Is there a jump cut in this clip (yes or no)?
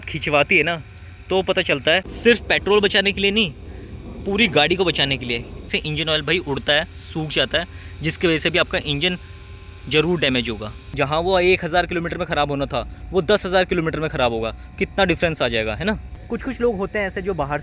yes